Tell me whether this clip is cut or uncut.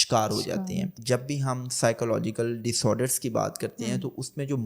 cut